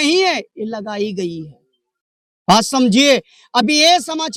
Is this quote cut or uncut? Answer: uncut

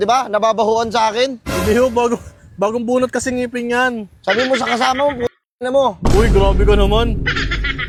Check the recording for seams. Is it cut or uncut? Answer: uncut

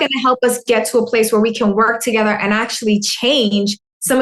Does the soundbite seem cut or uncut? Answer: uncut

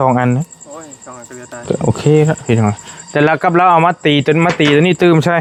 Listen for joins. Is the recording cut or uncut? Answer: uncut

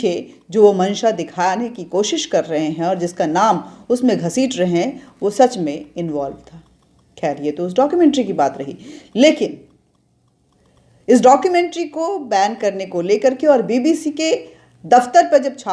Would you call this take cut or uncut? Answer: uncut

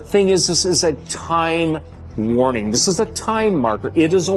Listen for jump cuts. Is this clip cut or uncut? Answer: uncut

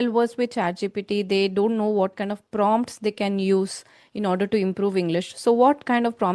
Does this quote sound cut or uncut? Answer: uncut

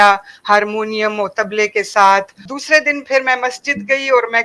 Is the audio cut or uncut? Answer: cut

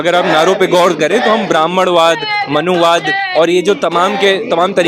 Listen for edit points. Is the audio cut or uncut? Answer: uncut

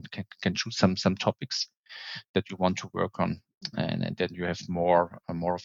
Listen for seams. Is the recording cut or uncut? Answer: uncut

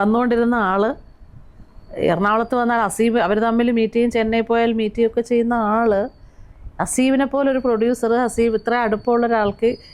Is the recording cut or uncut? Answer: uncut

